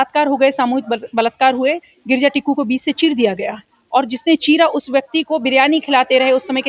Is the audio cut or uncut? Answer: uncut